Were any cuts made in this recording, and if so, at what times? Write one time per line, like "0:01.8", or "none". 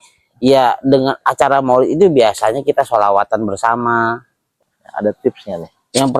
0:04.5